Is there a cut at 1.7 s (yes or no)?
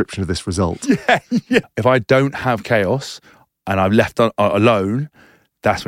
yes